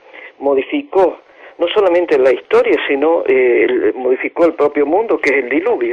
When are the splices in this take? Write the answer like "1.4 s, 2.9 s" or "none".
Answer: 2.1 s